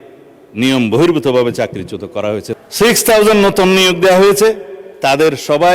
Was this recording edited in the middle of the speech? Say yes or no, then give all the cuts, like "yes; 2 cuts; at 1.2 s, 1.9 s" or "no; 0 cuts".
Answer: yes; 1 cut; at 2.5 s